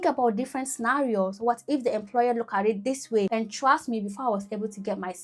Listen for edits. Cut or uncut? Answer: cut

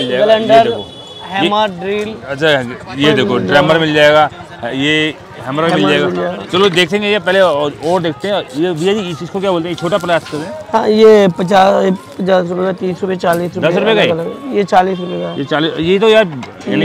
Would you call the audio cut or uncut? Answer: uncut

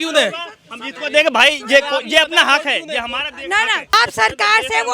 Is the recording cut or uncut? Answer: cut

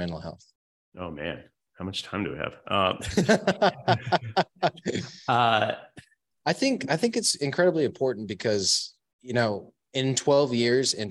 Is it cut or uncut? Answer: uncut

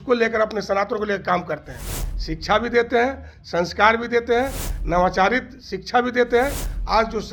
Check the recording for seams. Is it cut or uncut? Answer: uncut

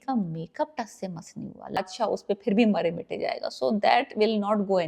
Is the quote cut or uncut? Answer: cut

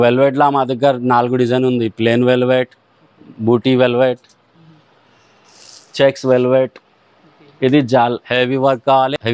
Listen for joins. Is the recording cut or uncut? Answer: uncut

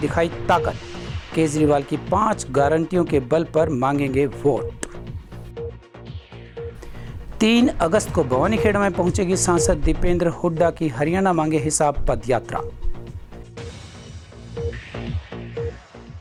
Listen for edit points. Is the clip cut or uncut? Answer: uncut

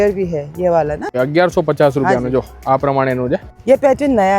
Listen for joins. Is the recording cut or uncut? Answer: cut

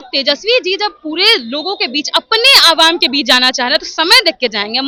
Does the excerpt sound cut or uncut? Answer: uncut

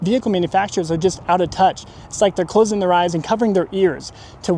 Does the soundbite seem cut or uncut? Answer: uncut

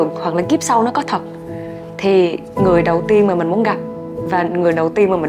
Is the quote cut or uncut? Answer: uncut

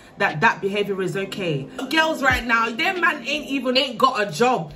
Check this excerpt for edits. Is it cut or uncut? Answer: cut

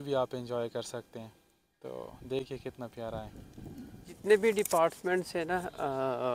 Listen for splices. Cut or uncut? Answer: cut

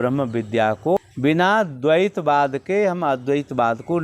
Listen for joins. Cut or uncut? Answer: cut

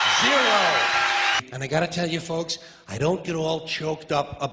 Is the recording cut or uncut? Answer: cut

